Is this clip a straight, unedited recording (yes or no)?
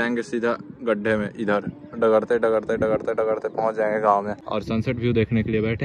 no